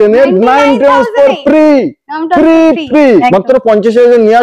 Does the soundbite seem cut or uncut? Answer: cut